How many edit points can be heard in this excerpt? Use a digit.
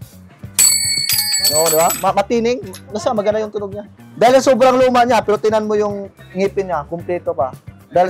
0